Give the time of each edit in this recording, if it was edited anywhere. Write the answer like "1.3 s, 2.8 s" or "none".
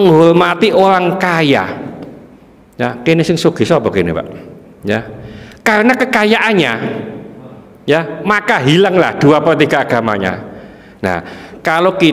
none